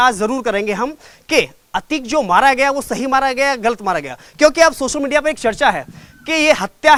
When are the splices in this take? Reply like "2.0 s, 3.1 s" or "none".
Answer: none